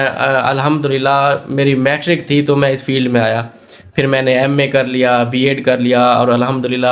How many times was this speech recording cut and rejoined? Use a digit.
0